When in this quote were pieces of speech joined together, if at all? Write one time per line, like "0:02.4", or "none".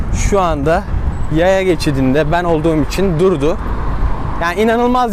none